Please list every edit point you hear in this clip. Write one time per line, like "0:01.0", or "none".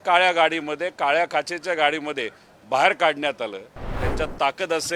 0:03.8